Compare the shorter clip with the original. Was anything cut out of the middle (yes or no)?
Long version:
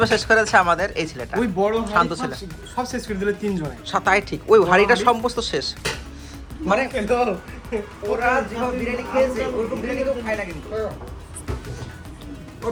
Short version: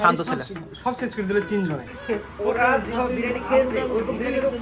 yes